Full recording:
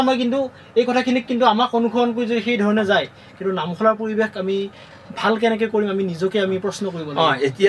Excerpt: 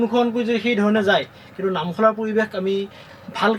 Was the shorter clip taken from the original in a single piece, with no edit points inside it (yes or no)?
yes